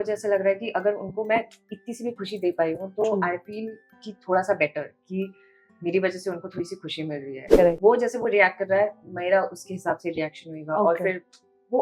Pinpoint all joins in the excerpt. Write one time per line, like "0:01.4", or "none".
0:07.4